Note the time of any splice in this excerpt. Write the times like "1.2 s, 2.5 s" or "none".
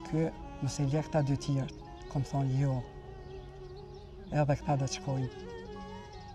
none